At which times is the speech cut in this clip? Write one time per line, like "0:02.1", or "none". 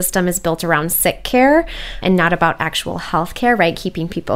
none